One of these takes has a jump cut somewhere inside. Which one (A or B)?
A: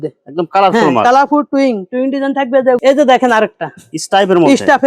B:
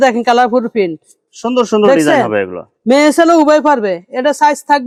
A